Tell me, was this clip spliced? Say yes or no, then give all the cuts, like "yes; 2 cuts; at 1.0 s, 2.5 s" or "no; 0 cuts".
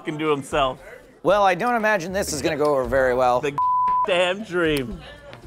no; 0 cuts